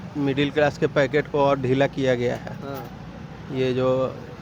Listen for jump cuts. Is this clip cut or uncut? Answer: uncut